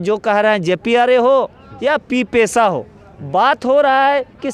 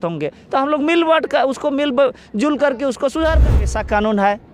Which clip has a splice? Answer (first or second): second